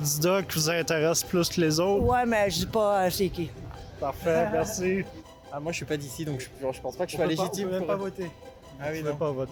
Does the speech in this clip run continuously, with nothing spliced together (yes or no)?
yes